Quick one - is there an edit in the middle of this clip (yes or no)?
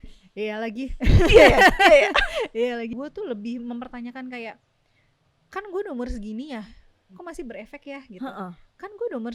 yes